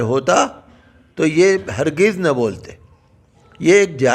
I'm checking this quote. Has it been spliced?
no; 0 cuts

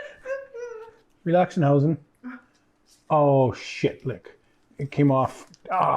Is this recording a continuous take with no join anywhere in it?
no; 1 cut; at 1.0 s

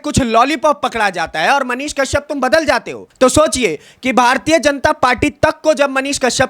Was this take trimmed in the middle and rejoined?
yes; 1 cut; at 3.0 s

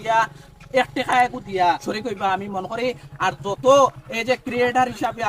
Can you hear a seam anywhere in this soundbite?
yes; 1 cut; at 1.8 s

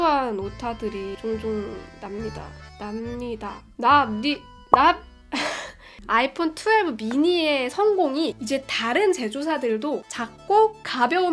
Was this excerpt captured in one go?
no; 3 cuts; at 4.5 s, 6.0 s, 10.0 s

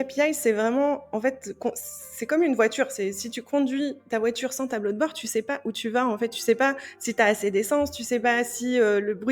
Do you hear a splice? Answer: no; 0 cuts

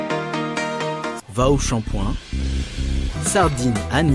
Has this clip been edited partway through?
yes; 1 cut; at 1.2 s

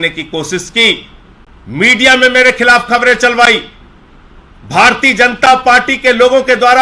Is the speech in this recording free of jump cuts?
yes; 0 cuts

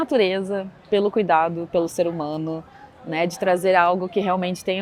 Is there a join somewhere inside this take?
no; 0 cuts

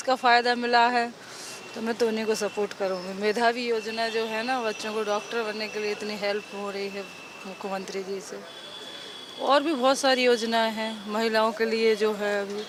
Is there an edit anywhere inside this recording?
no; 0 cuts

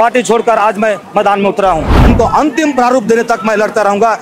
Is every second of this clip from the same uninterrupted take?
no; 1 cut; at 2.0 s

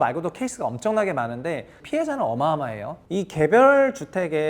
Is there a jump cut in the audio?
yes; 2 cuts; at 1.8 s, 2.9 s

